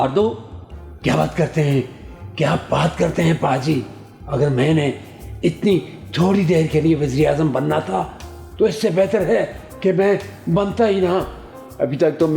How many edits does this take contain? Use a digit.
0